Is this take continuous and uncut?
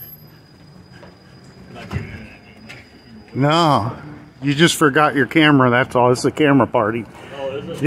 yes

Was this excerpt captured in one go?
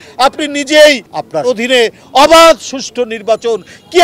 no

